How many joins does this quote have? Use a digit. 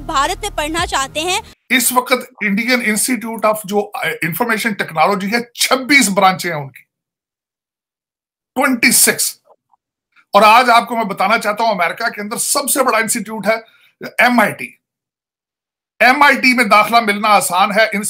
1